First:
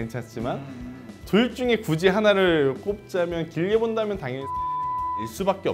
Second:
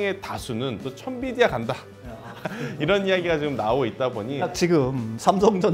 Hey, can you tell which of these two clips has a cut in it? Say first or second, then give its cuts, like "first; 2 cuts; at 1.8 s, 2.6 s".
second; 2 cuts; at 0.9 s, 4.5 s